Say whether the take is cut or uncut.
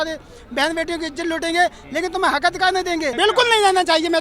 cut